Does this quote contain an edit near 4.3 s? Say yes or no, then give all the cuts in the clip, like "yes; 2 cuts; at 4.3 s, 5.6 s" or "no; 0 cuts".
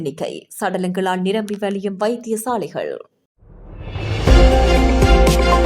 no; 1 cut; at 3.0 s